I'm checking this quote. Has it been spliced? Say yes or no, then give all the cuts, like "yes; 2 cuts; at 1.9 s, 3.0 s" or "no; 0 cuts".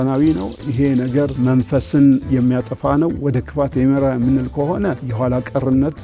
yes; 2 cuts; at 1.3 s, 5.1 s